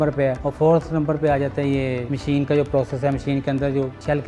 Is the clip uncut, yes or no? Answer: yes